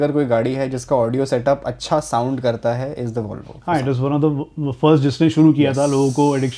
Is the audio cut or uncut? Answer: uncut